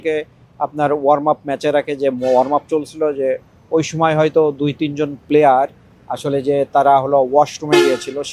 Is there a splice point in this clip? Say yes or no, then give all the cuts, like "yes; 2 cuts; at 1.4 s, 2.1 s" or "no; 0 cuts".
no; 0 cuts